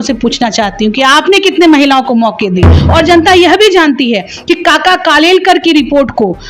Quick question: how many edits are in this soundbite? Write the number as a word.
one